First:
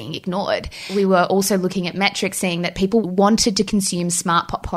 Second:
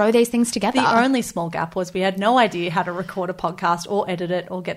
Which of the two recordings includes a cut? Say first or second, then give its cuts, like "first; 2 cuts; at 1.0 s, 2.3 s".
first; 2 cuts; at 0.9 s, 3.0 s